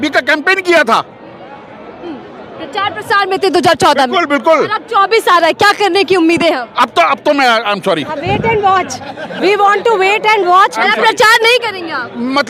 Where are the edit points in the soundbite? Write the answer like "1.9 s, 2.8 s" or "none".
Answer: none